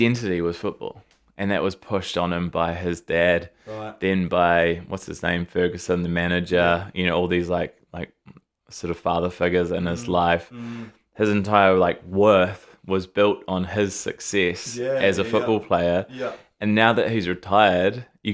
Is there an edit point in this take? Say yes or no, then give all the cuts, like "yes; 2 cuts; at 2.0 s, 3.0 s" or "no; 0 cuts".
no; 0 cuts